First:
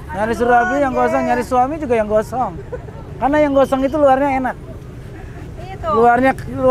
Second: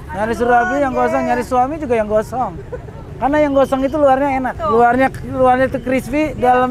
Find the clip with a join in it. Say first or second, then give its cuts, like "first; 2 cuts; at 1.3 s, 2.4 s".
second; 1 cut; at 4.6 s